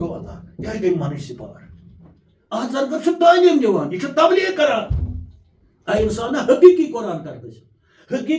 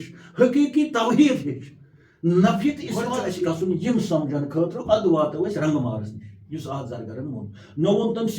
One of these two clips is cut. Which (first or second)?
second